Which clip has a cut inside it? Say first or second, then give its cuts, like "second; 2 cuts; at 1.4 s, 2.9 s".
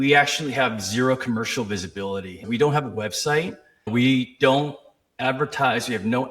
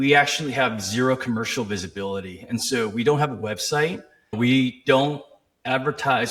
first; 1 cut; at 2.4 s